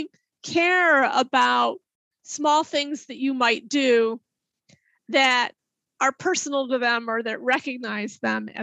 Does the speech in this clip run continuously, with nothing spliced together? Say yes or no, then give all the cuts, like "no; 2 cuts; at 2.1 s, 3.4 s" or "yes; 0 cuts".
yes; 0 cuts